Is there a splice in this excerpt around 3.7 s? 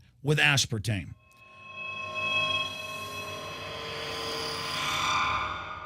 yes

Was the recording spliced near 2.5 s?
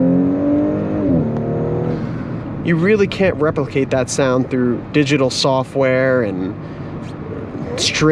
yes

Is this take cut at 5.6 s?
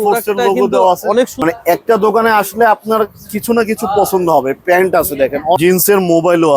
yes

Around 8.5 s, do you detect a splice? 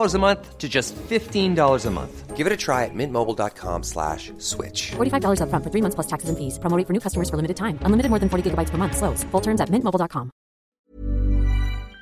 no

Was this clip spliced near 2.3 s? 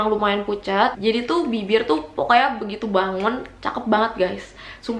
no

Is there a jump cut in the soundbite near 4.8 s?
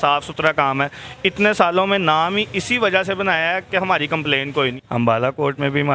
yes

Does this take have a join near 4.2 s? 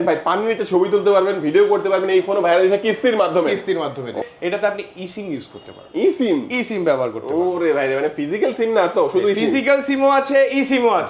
yes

